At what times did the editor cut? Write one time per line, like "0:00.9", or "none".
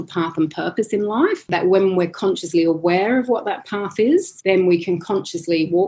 0:01.5
0:04.3